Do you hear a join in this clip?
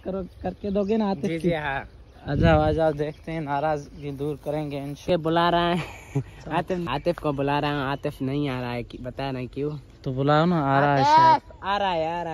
no; 0 cuts

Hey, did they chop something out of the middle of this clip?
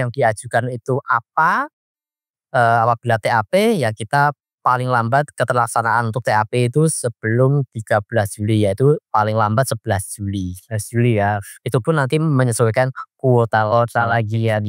no; 0 cuts

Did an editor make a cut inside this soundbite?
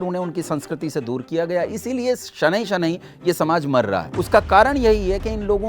yes; 1 cut; at 4.1 s

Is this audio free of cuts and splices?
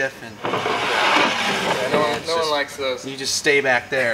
yes; 0 cuts

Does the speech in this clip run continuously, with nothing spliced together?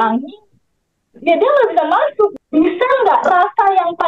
no; 1 cut; at 2.3 s

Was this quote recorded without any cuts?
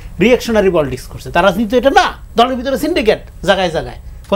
no; 1 cut; at 2.2 s

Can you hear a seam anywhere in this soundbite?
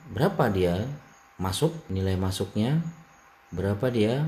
yes; 1 cut; at 1.8 s

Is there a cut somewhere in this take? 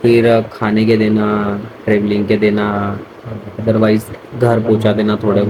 no; 0 cuts

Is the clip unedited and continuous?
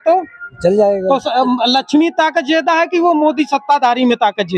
yes; 0 cuts

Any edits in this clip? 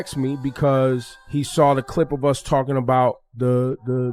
no; 0 cuts

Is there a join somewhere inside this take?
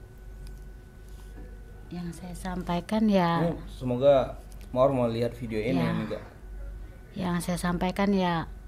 no; 0 cuts

